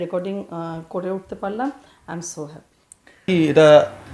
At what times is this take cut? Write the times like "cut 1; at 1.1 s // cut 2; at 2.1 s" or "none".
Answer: cut 1; at 3.2 s